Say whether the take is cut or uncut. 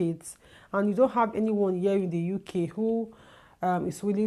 uncut